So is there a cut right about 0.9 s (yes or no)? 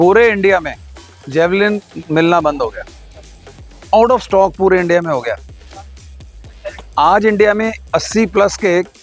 no